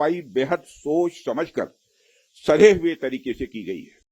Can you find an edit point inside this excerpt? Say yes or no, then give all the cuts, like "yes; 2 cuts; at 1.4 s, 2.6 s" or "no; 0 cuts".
no; 0 cuts